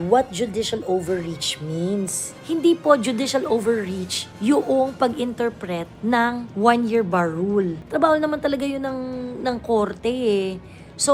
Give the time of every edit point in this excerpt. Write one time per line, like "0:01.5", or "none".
none